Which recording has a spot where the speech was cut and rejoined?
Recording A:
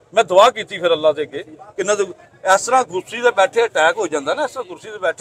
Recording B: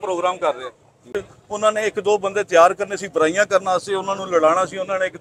B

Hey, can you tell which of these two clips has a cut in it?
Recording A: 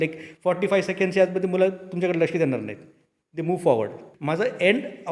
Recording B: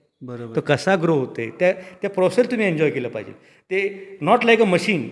A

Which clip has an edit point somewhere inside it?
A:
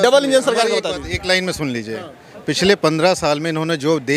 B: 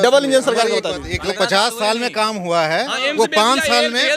B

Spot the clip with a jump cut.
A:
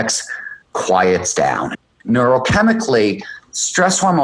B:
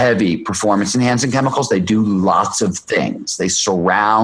A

